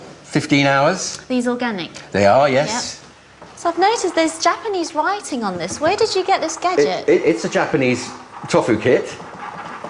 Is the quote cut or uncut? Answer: cut